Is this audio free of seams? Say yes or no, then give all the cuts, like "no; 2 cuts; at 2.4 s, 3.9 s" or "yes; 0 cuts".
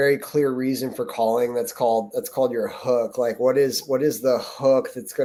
yes; 0 cuts